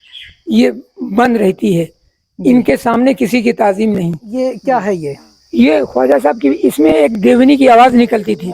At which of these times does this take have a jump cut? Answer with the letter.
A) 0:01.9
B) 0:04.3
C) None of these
B